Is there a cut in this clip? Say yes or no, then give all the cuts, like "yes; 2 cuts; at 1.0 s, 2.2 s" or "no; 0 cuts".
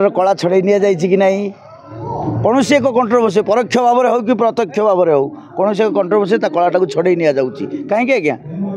no; 0 cuts